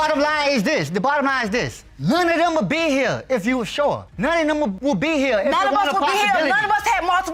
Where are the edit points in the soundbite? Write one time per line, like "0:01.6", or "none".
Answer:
none